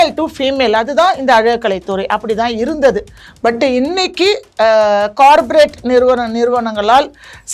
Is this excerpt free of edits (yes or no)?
yes